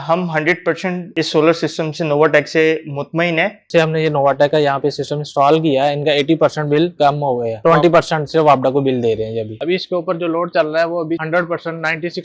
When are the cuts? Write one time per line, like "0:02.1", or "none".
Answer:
0:01.1
0:03.7
0:09.5